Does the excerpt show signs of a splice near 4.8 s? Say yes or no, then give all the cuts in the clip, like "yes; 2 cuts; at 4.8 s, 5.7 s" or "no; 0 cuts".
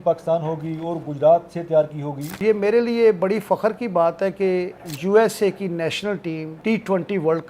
yes; 3 cuts; at 2.4 s, 4.8 s, 6.5 s